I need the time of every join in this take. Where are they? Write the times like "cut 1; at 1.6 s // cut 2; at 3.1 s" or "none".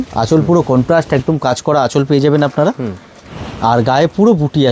none